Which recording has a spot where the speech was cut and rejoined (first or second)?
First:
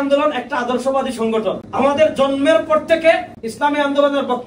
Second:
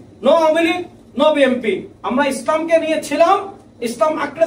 first